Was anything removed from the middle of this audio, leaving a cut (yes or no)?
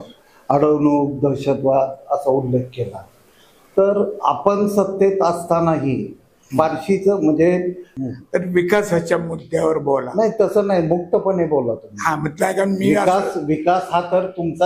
yes